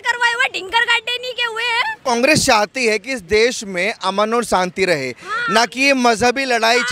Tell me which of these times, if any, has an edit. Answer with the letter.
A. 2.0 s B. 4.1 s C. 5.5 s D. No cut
A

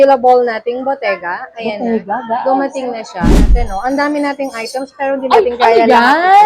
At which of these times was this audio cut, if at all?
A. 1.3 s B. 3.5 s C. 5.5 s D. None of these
B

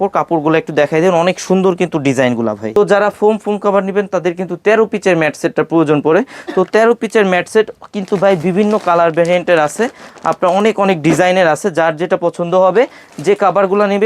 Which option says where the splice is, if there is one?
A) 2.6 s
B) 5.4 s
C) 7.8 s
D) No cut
A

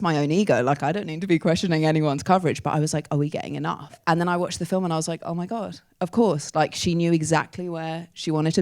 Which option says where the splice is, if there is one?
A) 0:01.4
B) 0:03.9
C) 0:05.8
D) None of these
B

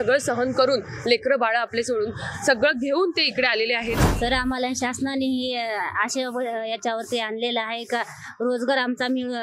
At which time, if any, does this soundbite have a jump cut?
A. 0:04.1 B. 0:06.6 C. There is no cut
A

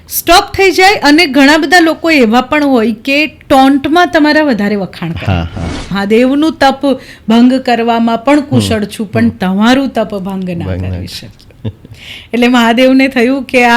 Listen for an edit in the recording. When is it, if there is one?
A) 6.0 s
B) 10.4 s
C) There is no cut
A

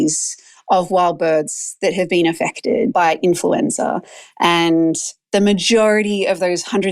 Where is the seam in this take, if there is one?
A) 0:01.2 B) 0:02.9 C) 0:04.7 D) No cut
B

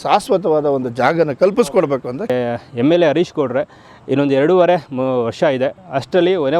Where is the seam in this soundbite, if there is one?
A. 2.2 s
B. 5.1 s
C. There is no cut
A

